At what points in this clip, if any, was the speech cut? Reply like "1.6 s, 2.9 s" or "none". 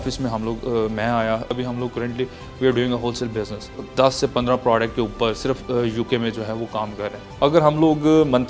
1.5 s, 3.8 s, 7.2 s